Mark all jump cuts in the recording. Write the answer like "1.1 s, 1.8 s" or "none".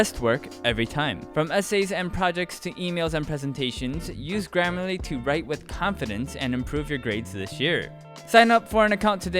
1.2 s